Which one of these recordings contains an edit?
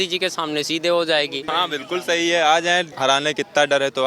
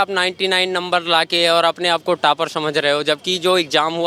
first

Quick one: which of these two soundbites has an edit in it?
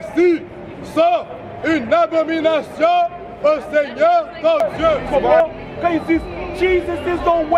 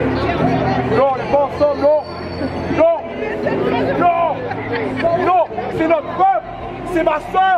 first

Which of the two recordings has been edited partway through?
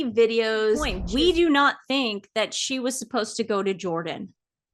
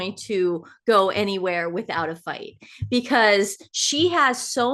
first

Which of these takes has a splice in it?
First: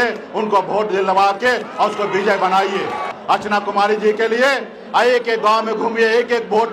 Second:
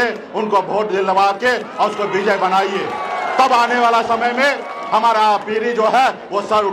first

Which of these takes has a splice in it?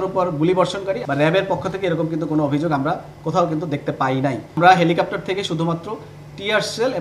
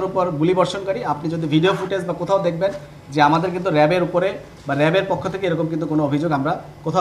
first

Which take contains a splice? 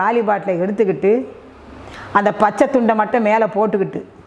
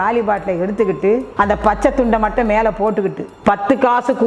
second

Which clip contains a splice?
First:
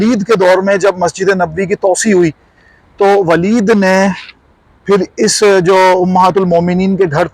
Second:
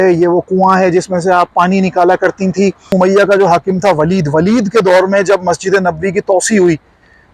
second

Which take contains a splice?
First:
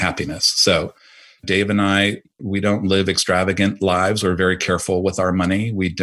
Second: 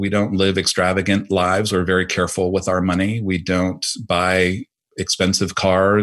first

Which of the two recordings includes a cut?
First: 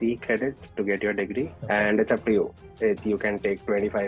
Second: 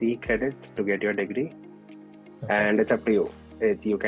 first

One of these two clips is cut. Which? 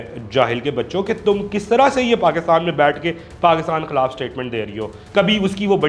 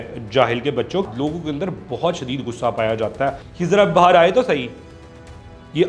second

